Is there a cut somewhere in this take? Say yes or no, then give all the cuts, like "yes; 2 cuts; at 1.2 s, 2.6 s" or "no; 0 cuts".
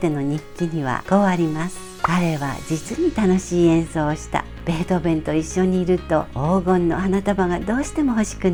no; 0 cuts